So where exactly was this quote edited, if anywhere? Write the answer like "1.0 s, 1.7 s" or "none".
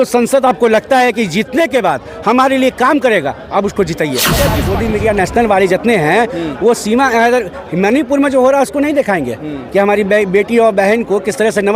4.5 s